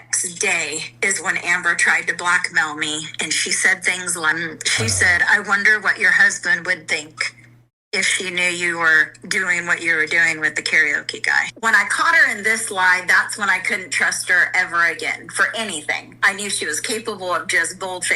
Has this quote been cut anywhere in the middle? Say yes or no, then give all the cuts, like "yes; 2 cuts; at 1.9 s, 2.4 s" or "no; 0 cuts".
yes; 2 cuts; at 4.3 s, 11.5 s